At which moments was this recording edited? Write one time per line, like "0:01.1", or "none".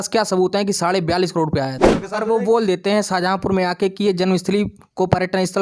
0:02.0